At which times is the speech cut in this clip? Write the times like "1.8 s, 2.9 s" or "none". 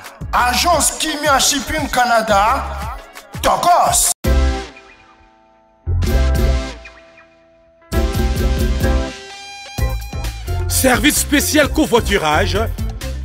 none